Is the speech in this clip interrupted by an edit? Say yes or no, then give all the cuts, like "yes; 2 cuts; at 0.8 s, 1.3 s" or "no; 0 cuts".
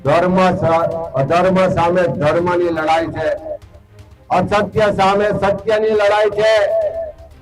no; 0 cuts